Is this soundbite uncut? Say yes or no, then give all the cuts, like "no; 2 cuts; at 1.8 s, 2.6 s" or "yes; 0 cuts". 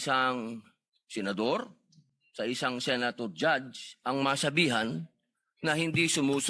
yes; 0 cuts